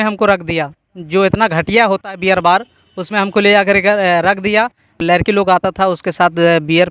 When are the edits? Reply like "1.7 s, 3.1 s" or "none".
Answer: 5.0 s